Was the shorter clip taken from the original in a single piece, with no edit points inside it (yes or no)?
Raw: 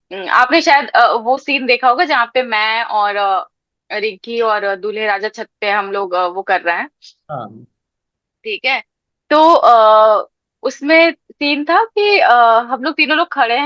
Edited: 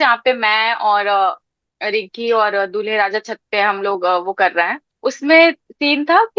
no